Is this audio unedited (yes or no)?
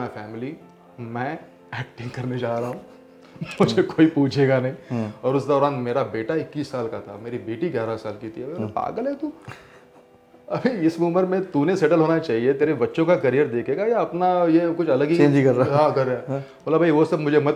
yes